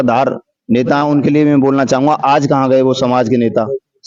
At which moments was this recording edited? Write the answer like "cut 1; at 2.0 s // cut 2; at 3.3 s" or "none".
none